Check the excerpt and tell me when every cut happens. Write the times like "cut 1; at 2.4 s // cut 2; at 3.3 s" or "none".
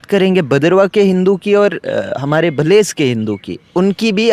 none